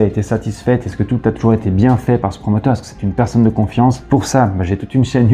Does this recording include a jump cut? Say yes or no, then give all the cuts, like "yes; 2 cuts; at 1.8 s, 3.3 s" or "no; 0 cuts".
no; 0 cuts